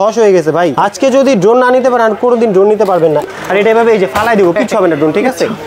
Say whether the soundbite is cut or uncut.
cut